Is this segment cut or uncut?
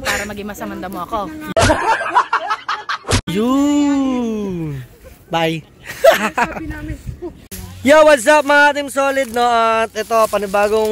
uncut